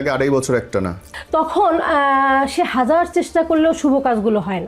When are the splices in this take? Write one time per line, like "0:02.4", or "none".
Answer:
0:01.0